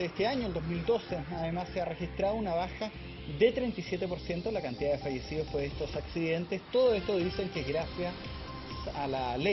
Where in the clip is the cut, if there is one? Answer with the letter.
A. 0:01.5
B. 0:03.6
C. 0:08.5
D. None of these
D